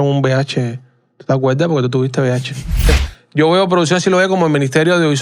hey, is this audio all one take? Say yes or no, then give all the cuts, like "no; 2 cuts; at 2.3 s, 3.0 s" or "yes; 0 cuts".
no; 1 cut; at 2.9 s